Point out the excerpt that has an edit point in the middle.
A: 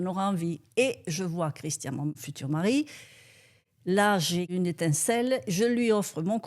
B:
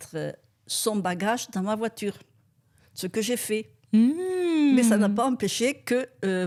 A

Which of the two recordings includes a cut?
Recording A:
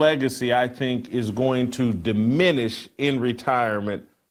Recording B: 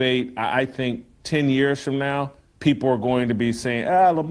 B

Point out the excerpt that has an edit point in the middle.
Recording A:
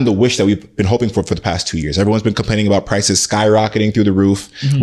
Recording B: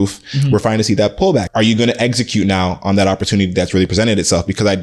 B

